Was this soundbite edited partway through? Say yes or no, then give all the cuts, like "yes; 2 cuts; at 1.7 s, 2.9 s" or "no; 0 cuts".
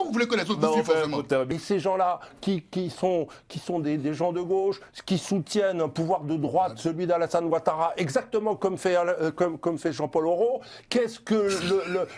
yes; 1 cut; at 1.6 s